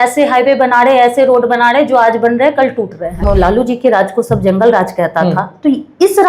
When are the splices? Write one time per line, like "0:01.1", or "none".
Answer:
0:03.2